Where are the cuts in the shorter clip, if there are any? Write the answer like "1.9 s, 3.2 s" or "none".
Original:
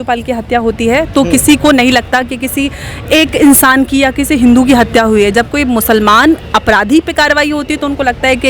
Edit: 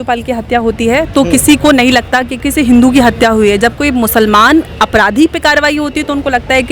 2.4 s